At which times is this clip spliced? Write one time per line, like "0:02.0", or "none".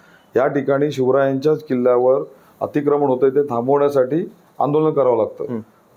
none